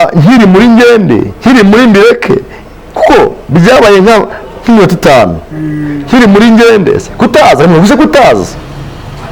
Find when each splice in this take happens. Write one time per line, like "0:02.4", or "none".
none